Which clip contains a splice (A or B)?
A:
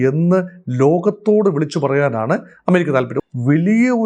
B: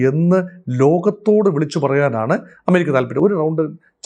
A